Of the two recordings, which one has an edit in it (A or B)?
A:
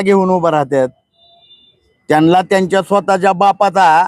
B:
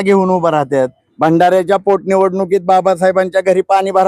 B